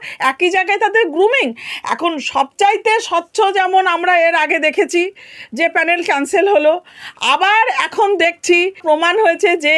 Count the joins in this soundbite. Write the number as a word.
one